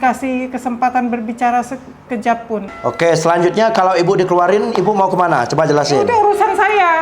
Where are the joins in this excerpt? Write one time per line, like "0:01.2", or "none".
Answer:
0:02.7